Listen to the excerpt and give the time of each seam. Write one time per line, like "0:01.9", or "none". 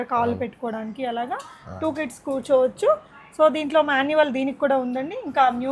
none